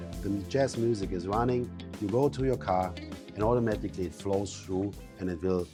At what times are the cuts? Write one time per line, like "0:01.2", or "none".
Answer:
none